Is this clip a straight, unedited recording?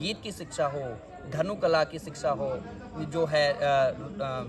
yes; 0 cuts

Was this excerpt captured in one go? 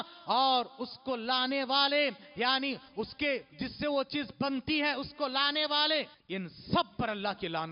no; 1 cut; at 6.2 s

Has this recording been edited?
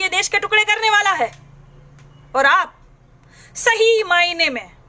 no; 0 cuts

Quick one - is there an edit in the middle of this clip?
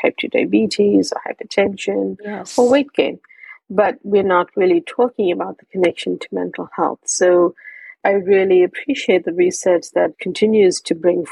yes; 2 cuts; at 8.0 s, 10.2 s

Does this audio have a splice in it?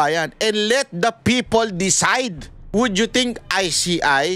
yes; 1 cut; at 2.5 s

